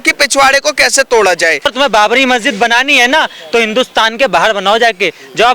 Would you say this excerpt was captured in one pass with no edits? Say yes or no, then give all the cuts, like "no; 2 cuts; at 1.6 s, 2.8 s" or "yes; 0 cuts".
no; 1 cut; at 1.6 s